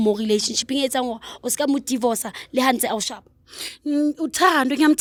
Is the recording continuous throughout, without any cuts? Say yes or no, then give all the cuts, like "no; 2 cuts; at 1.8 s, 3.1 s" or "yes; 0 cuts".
yes; 0 cuts